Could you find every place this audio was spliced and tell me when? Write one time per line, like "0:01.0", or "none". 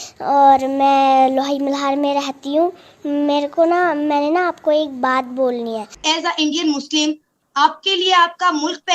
0:05.9